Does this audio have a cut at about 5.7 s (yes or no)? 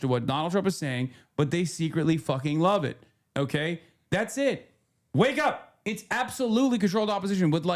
yes